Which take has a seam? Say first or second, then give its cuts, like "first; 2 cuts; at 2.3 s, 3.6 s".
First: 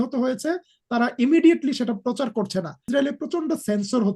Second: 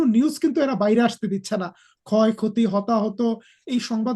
first; 1 cut; at 2.9 s